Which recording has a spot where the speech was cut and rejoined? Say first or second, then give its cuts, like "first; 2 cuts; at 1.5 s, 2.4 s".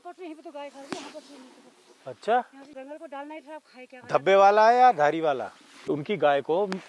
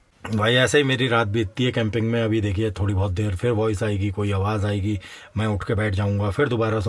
first; 2 cuts; at 2.7 s, 5.9 s